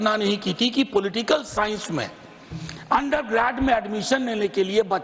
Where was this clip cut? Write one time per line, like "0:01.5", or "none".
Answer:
none